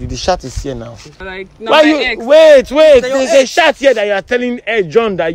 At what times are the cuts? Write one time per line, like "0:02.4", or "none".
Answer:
0:01.2